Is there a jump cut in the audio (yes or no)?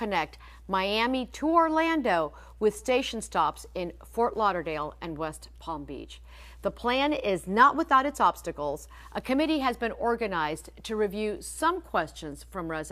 yes